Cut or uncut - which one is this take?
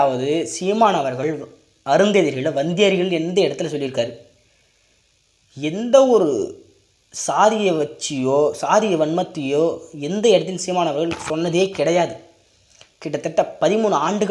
uncut